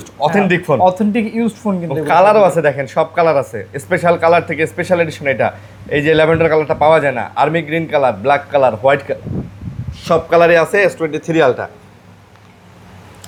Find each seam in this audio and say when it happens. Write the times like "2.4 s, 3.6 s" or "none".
none